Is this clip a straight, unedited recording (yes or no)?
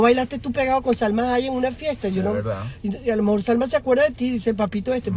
yes